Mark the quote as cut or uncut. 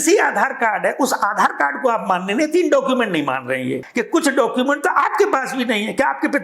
cut